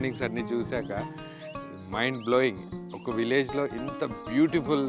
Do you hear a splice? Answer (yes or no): no